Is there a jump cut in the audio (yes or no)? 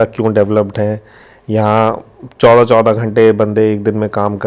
no